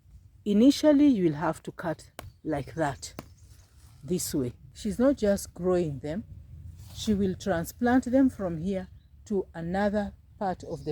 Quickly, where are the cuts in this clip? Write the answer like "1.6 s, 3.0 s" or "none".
4.7 s